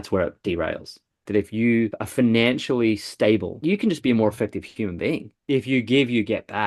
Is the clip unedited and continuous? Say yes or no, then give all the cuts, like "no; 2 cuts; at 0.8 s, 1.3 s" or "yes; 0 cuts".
no; 4 cuts; at 1.2 s, 2.0 s, 3.5 s, 5.3 s